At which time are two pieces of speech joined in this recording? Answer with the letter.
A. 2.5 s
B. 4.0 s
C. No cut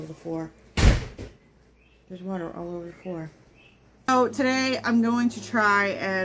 B